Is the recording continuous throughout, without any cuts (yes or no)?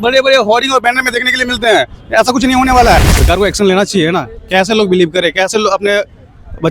no